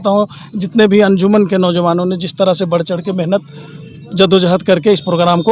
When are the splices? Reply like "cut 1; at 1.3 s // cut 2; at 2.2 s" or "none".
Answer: none